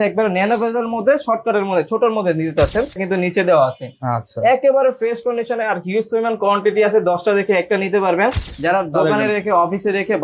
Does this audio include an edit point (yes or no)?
yes